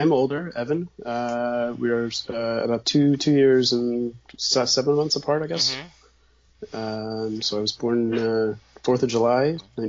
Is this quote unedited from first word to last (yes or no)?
yes